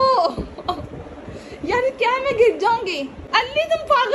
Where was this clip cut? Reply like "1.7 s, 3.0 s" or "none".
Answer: 3.1 s

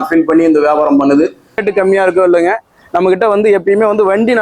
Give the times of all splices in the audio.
1.6 s

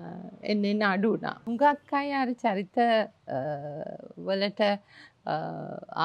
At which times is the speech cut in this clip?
1.4 s

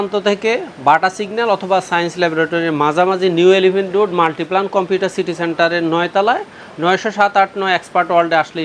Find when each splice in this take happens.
none

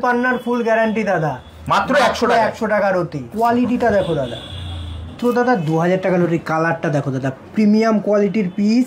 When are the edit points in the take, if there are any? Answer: 3.2 s, 5.2 s

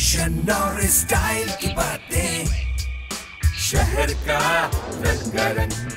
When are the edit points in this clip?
3.5 s

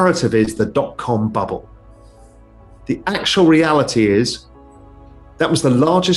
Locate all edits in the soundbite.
none

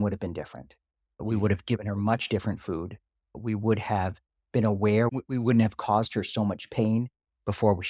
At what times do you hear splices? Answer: 1.2 s, 3.4 s, 5.1 s

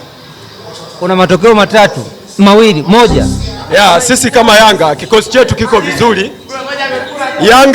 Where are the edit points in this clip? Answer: 3.7 s

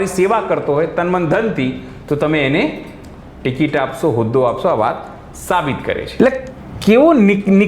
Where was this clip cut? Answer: 6.1 s

